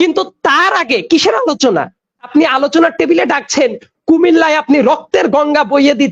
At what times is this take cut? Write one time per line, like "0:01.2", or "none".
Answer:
0:02.3